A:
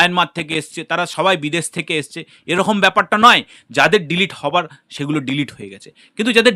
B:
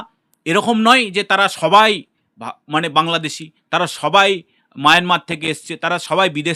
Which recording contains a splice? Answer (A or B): A